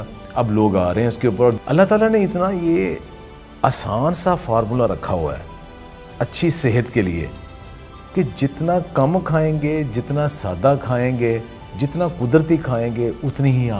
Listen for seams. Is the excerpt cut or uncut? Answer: cut